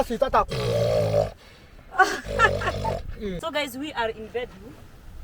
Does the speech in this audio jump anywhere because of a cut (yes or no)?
yes